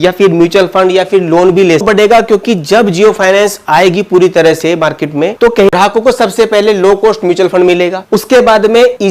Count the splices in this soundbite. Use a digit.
2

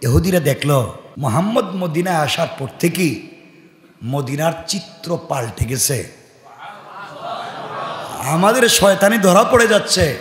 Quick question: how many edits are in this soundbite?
1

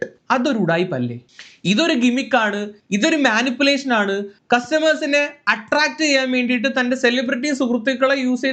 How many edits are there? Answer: 1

